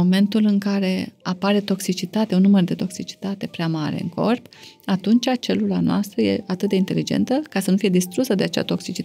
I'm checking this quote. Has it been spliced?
no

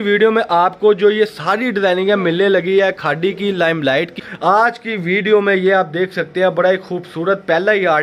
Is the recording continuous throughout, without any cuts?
no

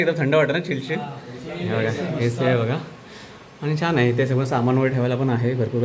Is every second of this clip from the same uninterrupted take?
yes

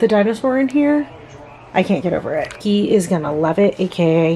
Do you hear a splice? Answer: no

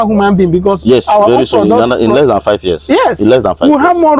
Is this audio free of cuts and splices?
yes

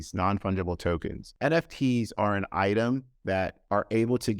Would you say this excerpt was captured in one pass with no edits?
no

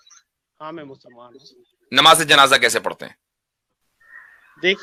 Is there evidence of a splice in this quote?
no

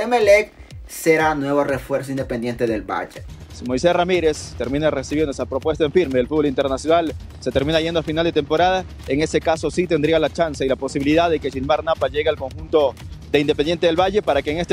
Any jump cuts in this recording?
yes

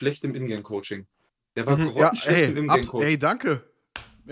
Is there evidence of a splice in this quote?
no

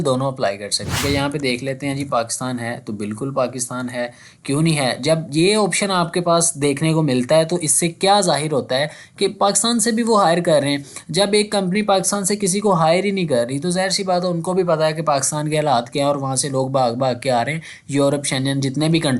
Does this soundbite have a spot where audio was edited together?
yes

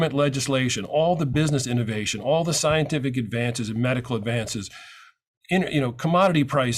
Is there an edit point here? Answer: no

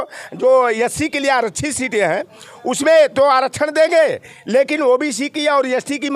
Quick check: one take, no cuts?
yes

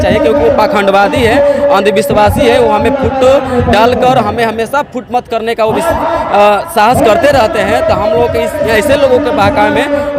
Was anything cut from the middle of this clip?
no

